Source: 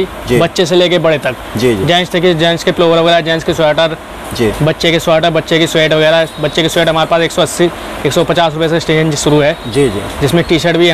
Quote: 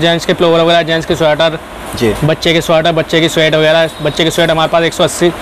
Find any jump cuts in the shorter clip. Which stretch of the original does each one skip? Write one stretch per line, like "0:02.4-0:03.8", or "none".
none